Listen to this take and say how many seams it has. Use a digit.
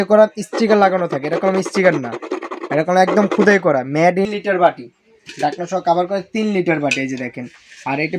1